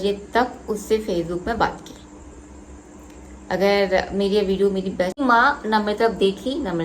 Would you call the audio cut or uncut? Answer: cut